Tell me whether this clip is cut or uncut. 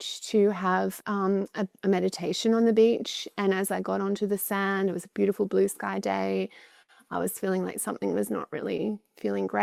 uncut